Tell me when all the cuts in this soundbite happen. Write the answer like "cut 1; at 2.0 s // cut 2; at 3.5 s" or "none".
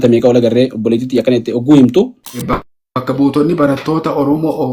cut 1; at 2.2 s